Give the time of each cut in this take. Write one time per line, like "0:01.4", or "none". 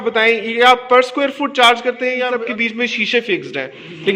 0:02.2